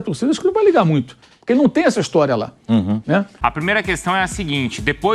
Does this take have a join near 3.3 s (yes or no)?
yes